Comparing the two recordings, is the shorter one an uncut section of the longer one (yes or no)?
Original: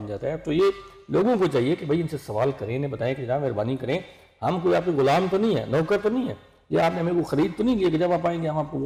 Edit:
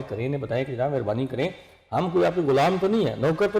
yes